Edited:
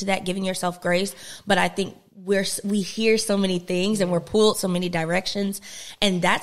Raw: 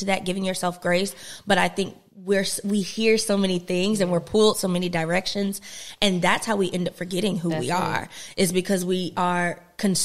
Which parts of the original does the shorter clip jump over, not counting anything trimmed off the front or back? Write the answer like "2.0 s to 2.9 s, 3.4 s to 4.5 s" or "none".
none